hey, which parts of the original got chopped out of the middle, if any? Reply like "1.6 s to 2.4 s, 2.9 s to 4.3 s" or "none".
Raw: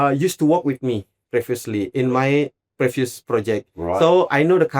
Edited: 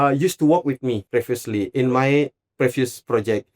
1.0 s to 1.2 s